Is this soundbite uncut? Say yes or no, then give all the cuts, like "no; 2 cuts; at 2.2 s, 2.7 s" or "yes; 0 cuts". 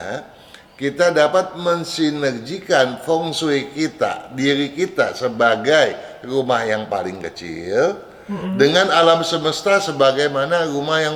yes; 0 cuts